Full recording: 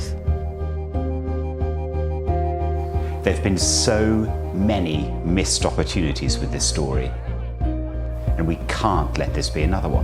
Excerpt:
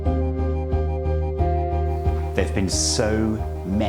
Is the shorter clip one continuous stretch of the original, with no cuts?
yes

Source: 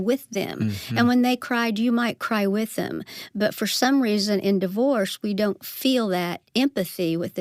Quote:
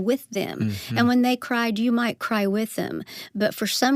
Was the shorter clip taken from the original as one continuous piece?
yes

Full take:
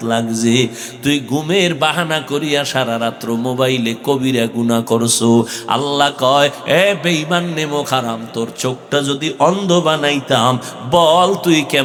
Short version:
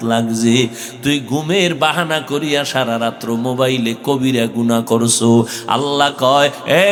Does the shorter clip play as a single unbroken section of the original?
yes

